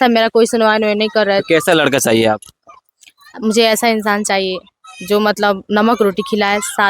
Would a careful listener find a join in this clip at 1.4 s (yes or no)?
yes